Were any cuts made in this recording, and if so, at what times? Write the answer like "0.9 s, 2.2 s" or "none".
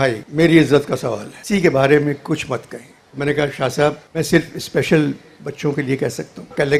none